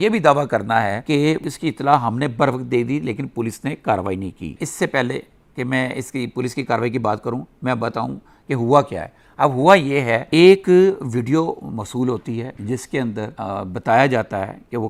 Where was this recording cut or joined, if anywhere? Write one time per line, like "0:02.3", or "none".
none